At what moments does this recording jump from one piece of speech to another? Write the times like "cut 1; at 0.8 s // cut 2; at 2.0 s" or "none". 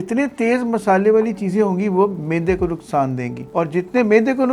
none